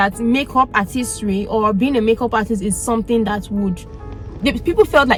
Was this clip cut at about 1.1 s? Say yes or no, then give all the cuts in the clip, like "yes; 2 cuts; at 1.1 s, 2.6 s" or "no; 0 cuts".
no; 0 cuts